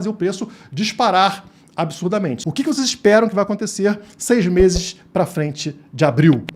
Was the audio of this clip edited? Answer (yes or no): yes